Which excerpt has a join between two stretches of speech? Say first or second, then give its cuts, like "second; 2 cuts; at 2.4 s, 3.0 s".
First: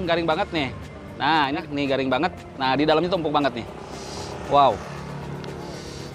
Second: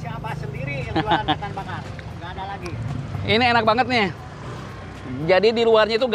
first; 1 cut; at 1.6 s